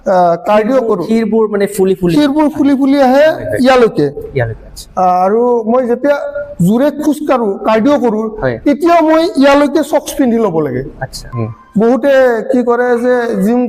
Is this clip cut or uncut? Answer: cut